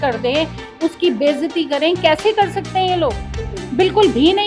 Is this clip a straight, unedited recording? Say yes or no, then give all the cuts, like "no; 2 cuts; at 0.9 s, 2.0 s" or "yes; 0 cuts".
yes; 0 cuts